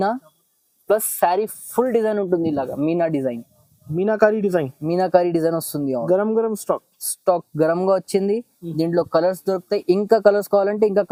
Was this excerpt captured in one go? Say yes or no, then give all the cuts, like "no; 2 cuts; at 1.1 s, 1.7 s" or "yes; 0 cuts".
yes; 0 cuts